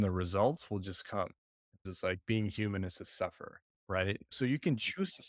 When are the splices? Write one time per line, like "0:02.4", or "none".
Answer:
0:01.9

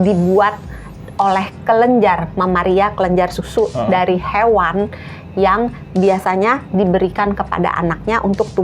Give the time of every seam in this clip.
none

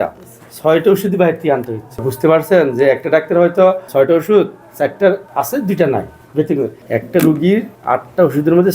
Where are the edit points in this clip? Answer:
0:02.1
0:03.8
0:04.6
0:05.3
0:06.3
0:07.7

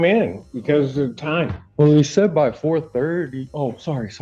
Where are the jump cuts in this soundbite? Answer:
0:01.6

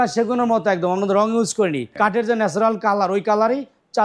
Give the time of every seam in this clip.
0:01.8

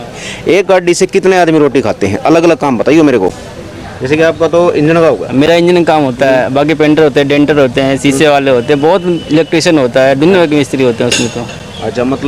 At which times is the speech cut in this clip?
none

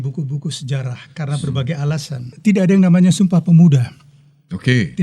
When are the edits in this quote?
0:02.3

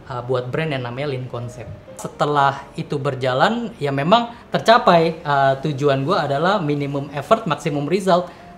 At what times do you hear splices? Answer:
0:02.0

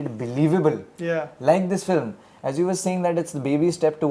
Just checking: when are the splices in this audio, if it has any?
none

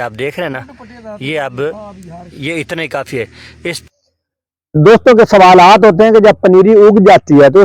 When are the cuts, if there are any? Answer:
0:03.8

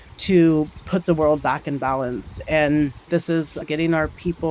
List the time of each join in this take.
0:03.5

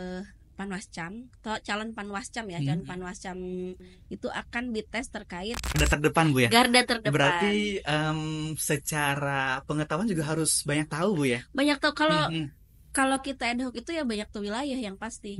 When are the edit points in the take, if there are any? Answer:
0:05.8

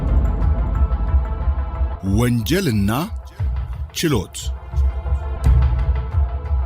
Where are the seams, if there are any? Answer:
0:01.9

